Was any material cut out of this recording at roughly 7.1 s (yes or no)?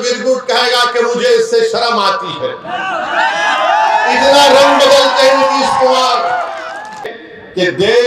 yes